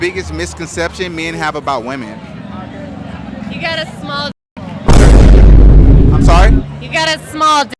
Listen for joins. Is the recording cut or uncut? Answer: uncut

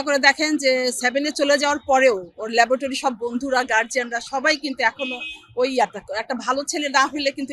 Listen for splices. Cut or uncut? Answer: uncut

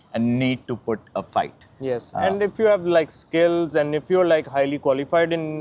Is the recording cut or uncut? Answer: uncut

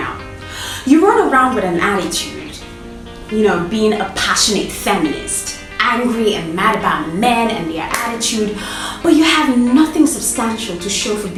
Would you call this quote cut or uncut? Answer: uncut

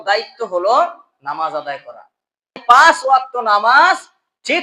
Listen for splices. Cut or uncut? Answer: cut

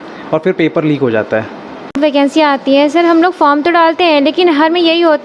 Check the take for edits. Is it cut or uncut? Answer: cut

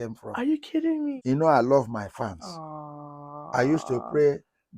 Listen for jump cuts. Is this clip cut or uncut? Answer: cut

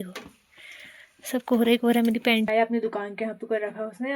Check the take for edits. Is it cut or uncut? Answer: cut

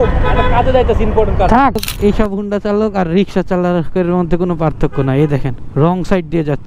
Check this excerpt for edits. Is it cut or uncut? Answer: cut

